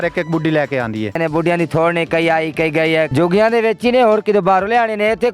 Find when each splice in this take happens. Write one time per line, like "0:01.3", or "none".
0:01.2
0:03.1